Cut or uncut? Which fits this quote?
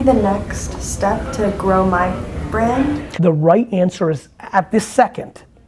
cut